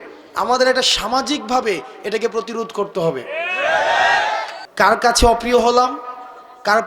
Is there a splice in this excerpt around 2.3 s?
no; 1 cut; at 4.6 s

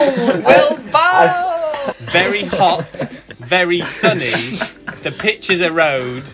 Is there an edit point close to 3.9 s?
no; 1 cut; at 1.9 s

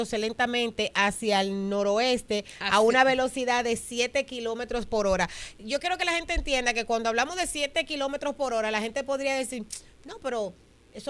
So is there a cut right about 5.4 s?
no; 0 cuts

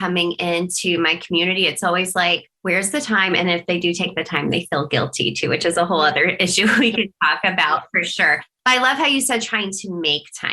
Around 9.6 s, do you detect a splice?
no; 1 cut; at 2.5 s

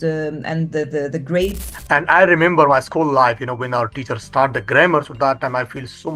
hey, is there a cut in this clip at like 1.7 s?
yes; 1 cut; at 1.7 s

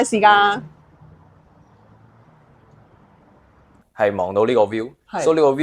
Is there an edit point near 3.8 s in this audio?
yes; 1 cut; at 3.8 s

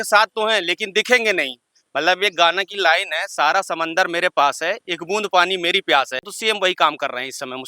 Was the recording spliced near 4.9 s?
no; 1 cut; at 6.3 s

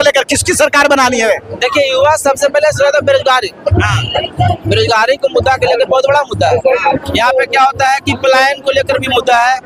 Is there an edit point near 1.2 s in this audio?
no; 0 cuts

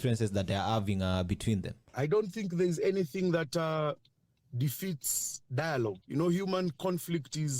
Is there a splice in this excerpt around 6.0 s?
yes; 2 cuts; at 1.8 s, 6.0 s

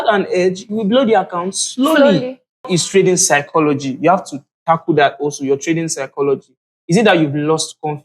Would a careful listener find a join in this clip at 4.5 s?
no; 1 cut; at 2.6 s

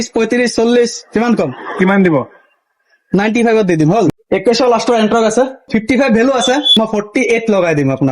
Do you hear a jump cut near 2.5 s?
no; 3 cuts; at 4.1 s, 5.7 s, 6.8 s

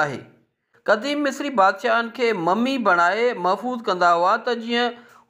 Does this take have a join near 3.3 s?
no; 1 cut; at 1.0 s

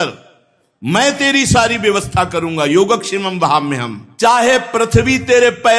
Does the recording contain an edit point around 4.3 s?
yes; 1 cut; at 4.3 s

